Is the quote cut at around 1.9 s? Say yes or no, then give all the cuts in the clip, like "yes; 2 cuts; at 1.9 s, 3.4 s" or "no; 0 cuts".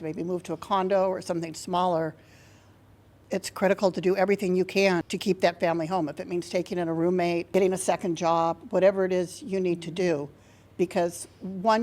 no; 3 cuts; at 3.2 s, 5.1 s, 7.5 s